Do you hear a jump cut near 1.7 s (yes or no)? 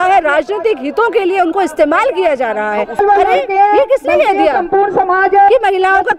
no